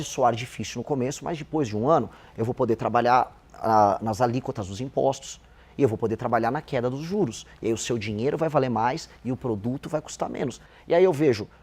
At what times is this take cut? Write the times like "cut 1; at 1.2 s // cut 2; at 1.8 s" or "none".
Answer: cut 1; at 10.6 s